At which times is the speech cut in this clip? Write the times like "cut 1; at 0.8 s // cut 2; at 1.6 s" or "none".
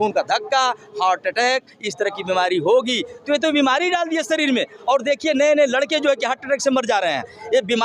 none